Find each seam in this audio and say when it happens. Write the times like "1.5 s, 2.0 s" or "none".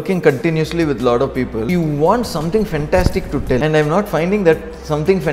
1.7 s, 3.6 s